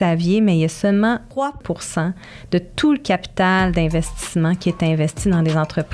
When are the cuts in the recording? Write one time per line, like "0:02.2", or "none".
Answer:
0:01.5